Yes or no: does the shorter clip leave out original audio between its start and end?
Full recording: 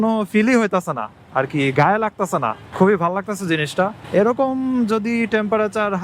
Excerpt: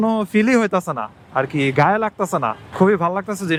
no